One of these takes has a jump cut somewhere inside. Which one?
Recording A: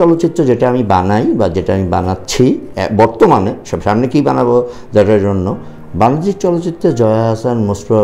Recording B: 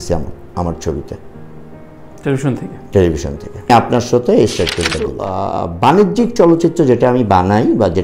B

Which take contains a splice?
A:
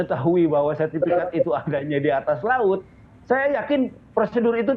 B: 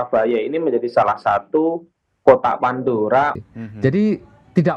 B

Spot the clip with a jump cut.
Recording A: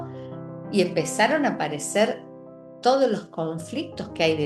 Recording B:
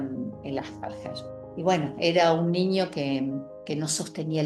B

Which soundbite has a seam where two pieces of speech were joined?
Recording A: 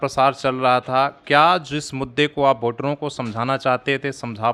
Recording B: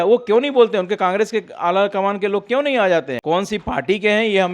B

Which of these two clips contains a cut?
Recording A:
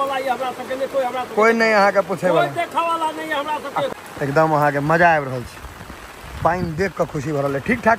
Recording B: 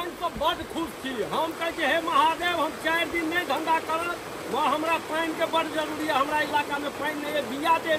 A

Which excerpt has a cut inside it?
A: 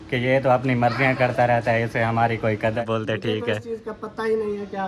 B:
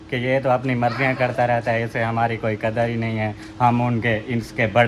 A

